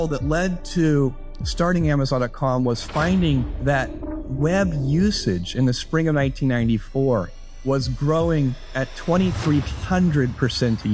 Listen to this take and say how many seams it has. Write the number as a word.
zero